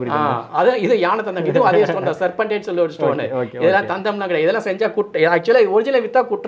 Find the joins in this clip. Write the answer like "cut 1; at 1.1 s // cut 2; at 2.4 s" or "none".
none